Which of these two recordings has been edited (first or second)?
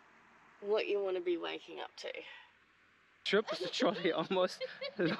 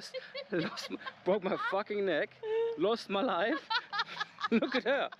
first